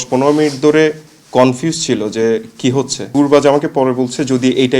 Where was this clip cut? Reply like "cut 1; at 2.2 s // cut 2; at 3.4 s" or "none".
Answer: cut 1; at 3.0 s